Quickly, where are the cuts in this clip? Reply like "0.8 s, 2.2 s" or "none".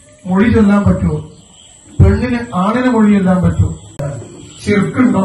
3.8 s

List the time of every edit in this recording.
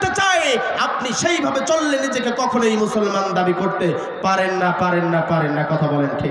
none

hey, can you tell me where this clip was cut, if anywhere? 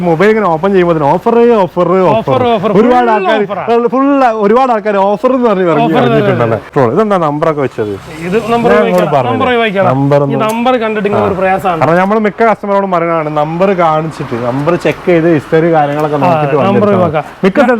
6.7 s

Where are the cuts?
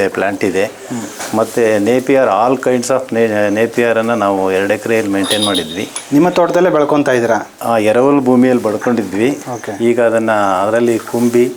none

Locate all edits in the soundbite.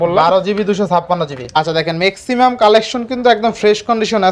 1.6 s

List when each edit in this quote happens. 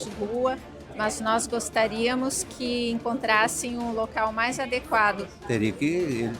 5.3 s

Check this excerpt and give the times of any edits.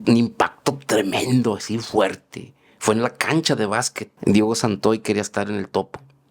4.0 s

